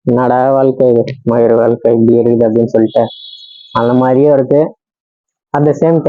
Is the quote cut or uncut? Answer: uncut